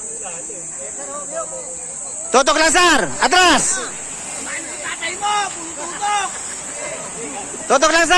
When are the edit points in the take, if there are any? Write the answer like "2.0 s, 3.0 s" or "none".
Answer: none